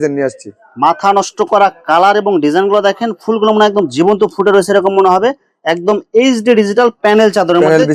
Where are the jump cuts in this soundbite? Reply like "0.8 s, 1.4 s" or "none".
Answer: none